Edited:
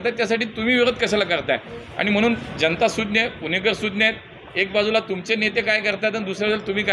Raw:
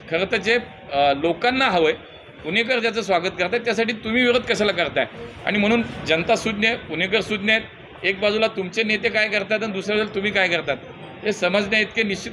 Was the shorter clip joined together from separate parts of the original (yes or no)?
no